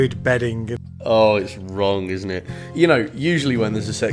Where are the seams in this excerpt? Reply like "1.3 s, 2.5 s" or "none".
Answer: 0.9 s, 2.6 s

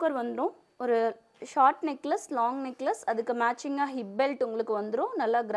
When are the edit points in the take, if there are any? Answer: none

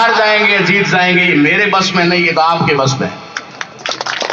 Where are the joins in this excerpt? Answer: none

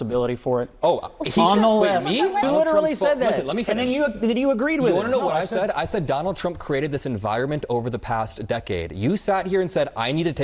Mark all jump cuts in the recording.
2.4 s

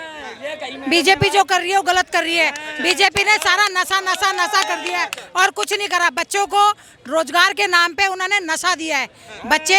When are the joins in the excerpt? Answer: none

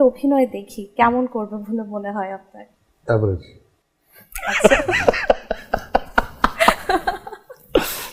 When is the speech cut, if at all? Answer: none

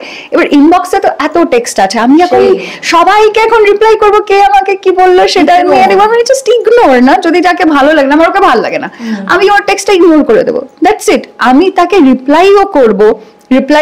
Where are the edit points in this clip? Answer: none

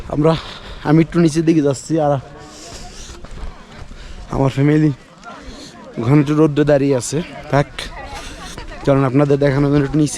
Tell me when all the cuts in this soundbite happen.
none

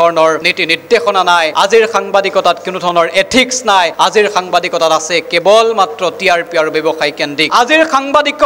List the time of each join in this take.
7.4 s

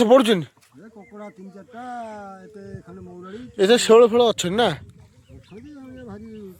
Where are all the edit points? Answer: none

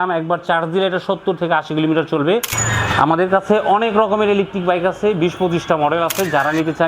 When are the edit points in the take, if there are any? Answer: 2.5 s

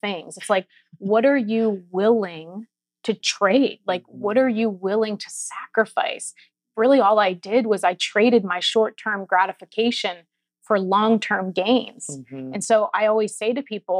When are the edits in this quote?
3.3 s, 6.5 s

